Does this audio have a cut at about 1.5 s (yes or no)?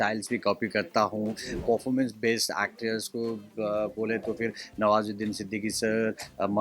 yes